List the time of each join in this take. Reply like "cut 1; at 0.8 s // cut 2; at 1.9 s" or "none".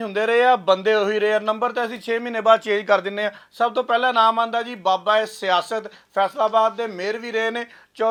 none